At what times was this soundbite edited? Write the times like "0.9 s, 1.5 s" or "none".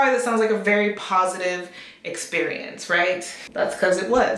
3.4 s

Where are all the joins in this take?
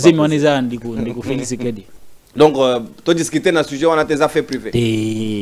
1.9 s

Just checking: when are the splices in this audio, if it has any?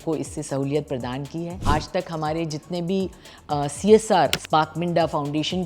1.6 s, 4.4 s

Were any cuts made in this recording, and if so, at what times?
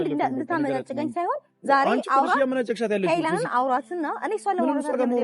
none

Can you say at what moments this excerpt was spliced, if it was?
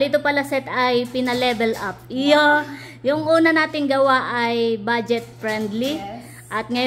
none

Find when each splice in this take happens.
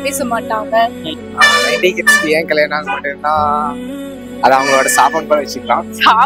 1.2 s

